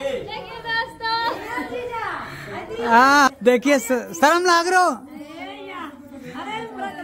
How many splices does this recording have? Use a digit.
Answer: 1